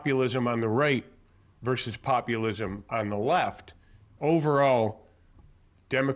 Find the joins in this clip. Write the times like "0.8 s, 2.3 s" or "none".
4.1 s